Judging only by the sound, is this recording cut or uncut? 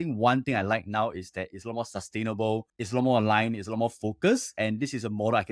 uncut